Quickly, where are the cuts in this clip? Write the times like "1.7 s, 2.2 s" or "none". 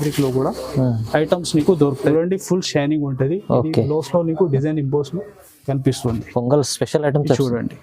2.1 s